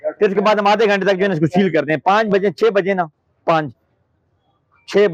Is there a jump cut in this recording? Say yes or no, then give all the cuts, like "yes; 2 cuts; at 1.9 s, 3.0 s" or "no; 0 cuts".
no; 0 cuts